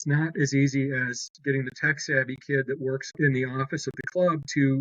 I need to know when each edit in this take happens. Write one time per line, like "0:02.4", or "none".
0:03.1